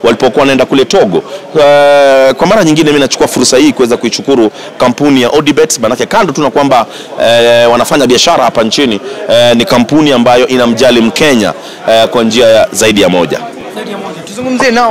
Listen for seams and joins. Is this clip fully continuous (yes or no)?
yes